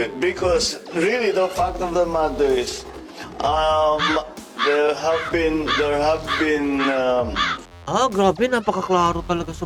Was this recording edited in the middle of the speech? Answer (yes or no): no